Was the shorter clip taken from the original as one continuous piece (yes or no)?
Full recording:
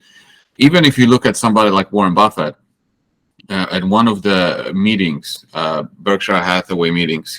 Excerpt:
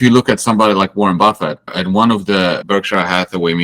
no